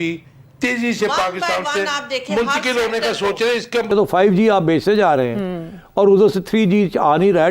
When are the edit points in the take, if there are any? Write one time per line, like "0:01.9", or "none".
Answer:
0:03.9